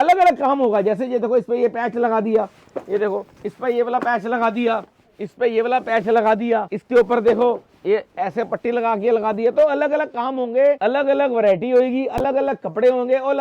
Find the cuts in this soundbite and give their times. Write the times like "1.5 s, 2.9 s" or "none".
6.8 s, 10.8 s